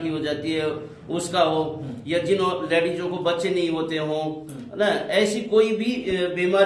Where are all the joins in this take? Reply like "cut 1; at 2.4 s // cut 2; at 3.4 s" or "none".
none